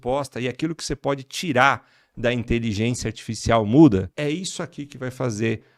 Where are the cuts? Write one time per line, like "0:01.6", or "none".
0:04.1

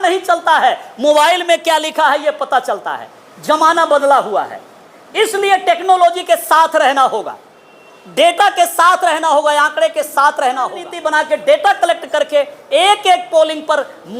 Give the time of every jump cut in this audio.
0:10.9

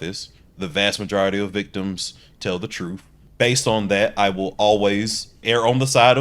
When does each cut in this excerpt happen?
0:03.2
0:05.4

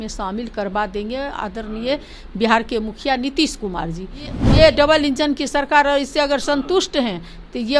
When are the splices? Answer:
0:04.4

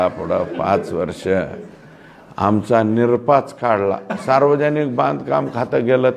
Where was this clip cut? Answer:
none

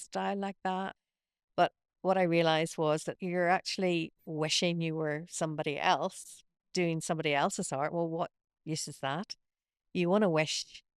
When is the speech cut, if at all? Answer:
0:01.1
0:03.1

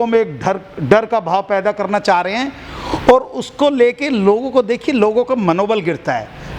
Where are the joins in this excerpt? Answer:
none

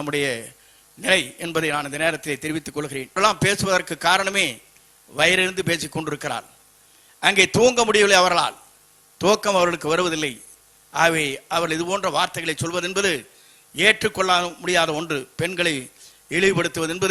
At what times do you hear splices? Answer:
0:03.2

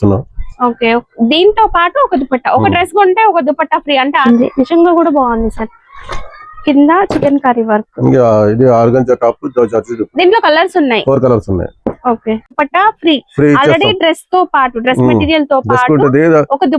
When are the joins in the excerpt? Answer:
0:04.2
0:12.6

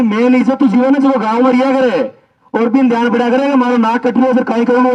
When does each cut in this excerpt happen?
none

